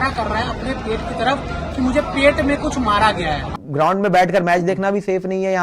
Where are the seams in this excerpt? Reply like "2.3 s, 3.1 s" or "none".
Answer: 3.6 s